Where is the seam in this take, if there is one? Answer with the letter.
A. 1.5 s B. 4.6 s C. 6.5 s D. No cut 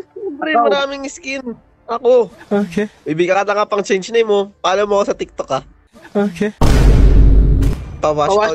C